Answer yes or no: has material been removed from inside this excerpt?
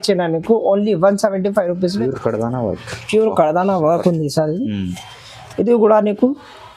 yes